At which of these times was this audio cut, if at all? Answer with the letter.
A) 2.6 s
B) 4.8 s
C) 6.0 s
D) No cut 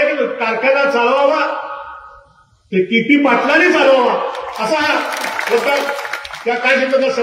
D